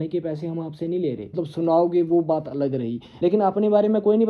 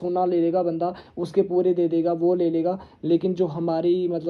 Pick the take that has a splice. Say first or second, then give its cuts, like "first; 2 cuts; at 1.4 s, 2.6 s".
first; 2 cuts; at 1.4 s, 3.0 s